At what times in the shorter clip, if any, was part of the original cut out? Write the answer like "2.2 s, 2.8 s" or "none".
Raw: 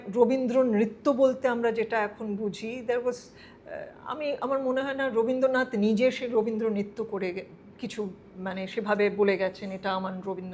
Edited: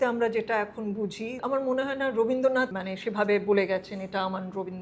1.4 s, 2.7 s